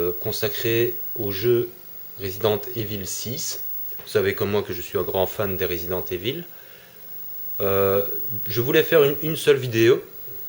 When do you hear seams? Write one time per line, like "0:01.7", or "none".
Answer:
0:04.3